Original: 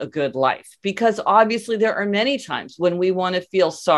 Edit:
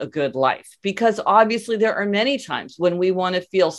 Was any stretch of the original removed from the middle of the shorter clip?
no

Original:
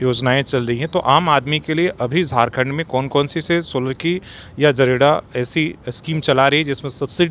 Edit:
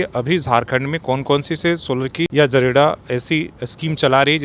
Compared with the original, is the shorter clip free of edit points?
no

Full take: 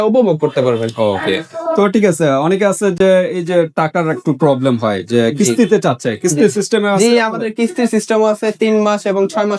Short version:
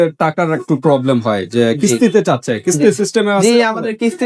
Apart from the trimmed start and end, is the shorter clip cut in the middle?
no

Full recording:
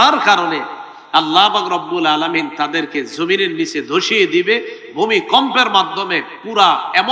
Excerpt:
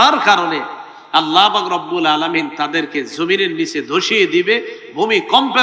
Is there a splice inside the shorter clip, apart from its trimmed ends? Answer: no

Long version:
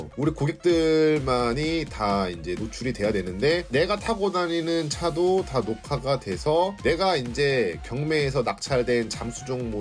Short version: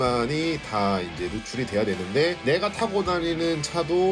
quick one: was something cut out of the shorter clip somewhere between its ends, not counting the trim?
no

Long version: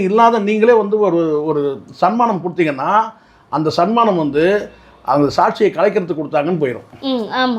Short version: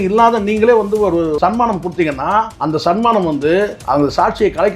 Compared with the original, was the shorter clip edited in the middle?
yes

